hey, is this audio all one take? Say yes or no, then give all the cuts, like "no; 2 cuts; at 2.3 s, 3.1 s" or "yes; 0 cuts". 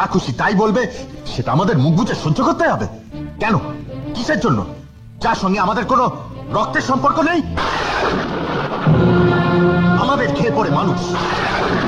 yes; 0 cuts